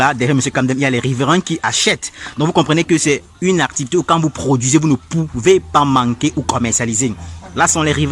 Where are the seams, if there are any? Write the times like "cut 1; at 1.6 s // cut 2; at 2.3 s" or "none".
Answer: none